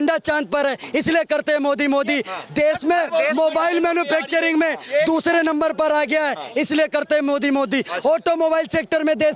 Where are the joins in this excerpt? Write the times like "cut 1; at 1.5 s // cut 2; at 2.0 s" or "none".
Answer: none